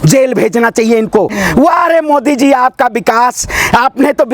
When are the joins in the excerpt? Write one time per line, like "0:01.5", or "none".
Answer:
0:01.3